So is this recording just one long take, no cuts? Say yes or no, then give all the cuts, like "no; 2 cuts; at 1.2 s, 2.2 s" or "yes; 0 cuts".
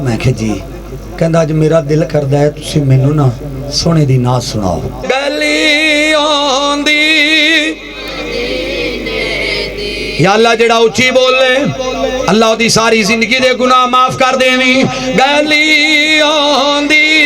no; 1 cut; at 5.0 s